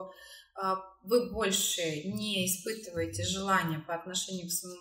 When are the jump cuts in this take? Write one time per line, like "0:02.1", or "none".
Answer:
none

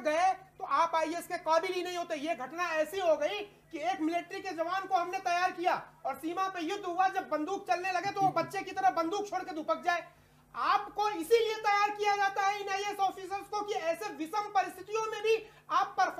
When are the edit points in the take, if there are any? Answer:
none

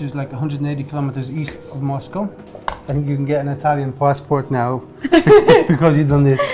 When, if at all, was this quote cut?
0:02.5

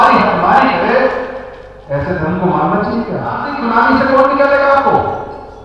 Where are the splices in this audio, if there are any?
0:03.5

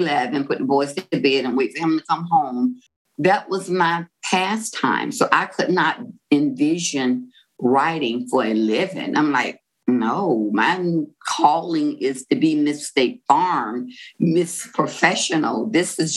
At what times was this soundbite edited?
0:03.0

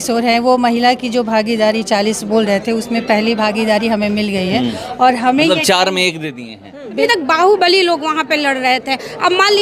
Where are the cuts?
0:07.0

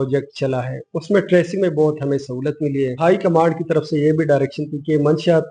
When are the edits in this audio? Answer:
0:03.0

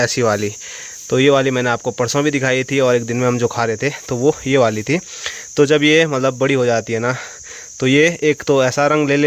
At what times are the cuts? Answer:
none

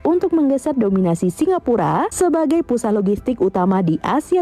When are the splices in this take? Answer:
0:02.1

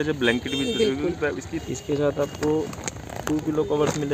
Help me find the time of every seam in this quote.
0:01.6

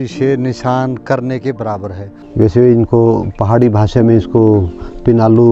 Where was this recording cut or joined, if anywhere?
0:02.3

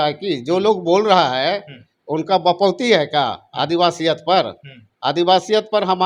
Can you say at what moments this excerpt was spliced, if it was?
none

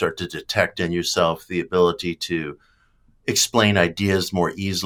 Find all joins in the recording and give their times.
none

